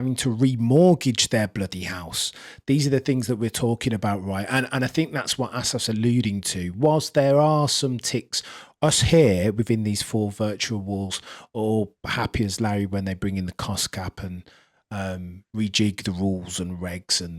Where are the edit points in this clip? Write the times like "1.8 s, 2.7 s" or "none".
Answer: none